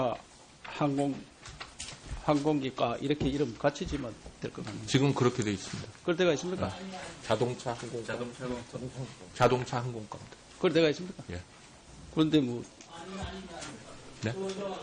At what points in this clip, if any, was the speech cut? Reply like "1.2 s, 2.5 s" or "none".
none